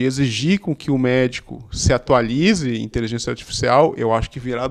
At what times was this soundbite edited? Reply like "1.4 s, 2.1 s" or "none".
none